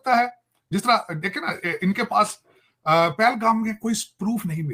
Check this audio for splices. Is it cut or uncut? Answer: uncut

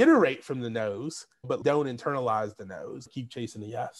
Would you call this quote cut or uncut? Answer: cut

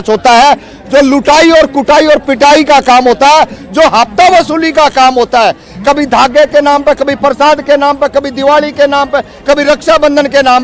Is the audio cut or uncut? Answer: uncut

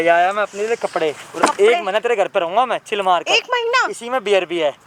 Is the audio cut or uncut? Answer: uncut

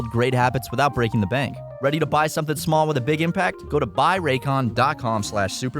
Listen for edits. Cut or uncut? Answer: cut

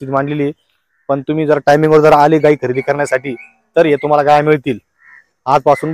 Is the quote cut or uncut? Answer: uncut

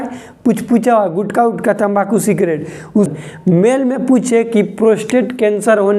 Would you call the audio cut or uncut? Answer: cut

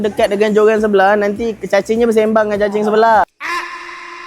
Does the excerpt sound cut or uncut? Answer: cut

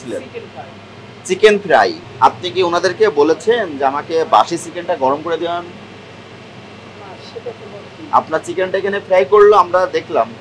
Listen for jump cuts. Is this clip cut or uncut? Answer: cut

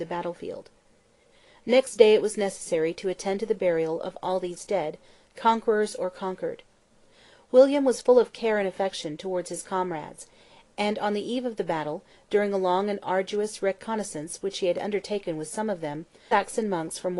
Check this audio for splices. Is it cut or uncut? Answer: uncut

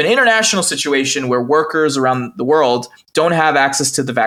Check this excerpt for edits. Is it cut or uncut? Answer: uncut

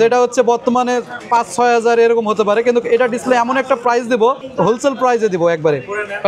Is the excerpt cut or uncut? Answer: cut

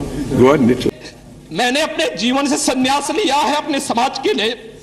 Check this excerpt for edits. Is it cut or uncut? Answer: cut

